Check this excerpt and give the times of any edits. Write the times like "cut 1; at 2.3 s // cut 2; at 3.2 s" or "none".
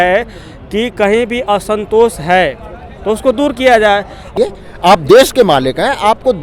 cut 1; at 4.3 s